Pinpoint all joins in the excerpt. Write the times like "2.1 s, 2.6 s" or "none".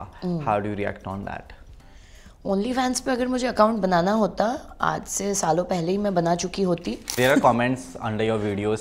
7.0 s